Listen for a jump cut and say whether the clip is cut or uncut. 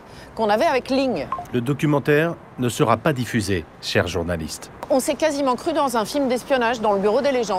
cut